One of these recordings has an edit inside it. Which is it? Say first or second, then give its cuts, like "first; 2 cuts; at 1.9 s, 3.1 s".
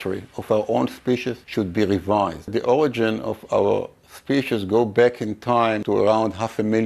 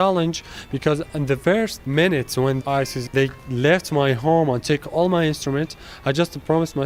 first; 3 cuts; at 1.4 s, 2.5 s, 5.8 s